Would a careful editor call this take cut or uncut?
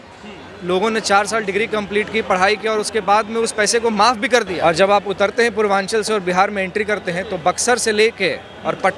cut